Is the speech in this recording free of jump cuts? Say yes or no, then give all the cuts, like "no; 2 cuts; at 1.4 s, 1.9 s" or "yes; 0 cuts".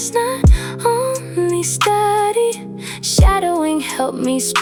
yes; 0 cuts